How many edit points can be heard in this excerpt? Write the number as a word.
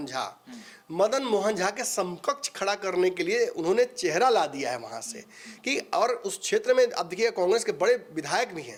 zero